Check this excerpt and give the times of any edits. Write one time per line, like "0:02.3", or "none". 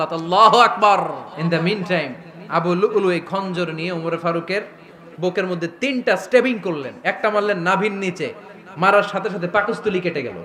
0:01.3